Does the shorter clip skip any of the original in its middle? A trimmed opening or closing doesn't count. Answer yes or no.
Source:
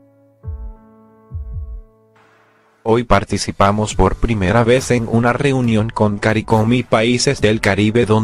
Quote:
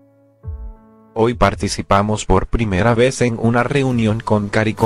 yes